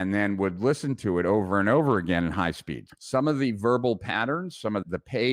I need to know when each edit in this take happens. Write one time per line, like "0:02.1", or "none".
0:02.8